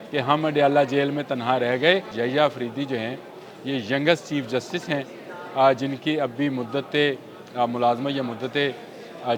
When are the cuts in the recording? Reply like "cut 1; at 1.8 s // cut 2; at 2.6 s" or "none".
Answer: cut 1; at 2.1 s